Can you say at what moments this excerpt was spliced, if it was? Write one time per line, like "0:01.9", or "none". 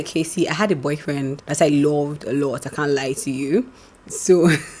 0:01.4